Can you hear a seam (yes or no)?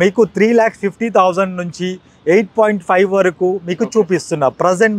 no